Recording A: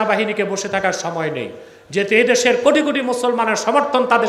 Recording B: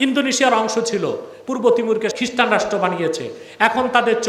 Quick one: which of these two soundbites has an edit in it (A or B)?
B